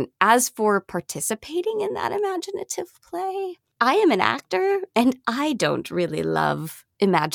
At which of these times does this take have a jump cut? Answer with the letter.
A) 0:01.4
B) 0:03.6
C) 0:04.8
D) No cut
B